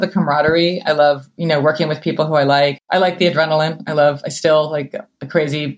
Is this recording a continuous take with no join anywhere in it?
no; 1 cut; at 2.7 s

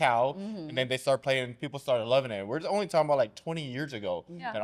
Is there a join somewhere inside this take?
no; 0 cuts

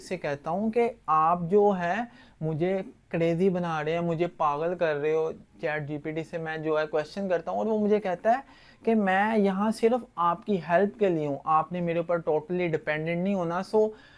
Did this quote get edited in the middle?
no; 0 cuts

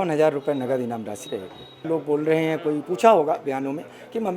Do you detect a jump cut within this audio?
yes; 1 cut; at 1.8 s

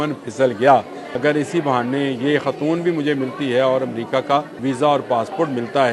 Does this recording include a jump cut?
yes; 2 cuts; at 1.0 s, 4.5 s

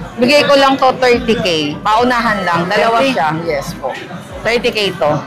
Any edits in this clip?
no; 0 cuts

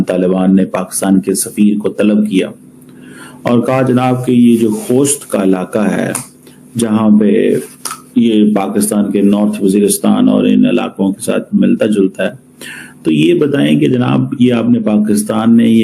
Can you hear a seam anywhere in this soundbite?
no; 0 cuts

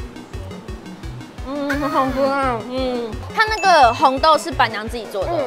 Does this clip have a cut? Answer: yes; 1 cut; at 3.2 s

